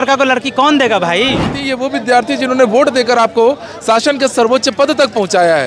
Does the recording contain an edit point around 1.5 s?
yes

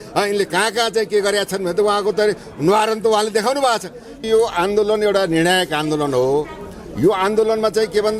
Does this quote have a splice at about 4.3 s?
yes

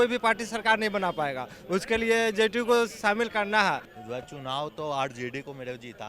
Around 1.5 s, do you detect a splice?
no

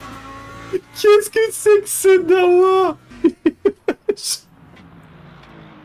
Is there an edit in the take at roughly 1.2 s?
no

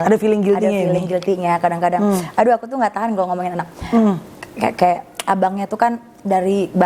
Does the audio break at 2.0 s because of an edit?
no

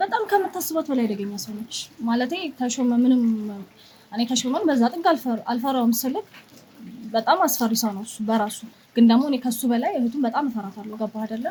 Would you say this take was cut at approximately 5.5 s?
no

